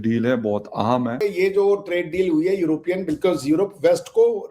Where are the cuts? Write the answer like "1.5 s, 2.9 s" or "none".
1.2 s